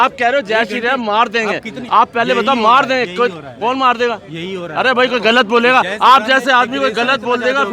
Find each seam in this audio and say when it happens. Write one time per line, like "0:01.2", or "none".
none